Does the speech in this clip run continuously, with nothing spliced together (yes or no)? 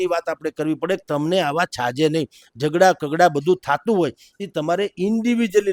yes